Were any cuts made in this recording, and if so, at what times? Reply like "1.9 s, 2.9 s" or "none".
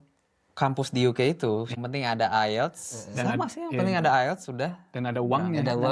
1.8 s